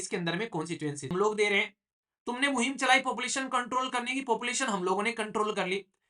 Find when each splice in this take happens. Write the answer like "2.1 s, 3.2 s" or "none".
1.1 s